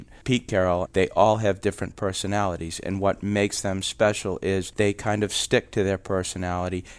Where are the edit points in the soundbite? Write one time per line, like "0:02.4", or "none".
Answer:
0:04.7